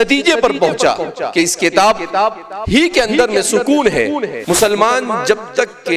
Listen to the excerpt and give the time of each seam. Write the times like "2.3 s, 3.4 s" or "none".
4.3 s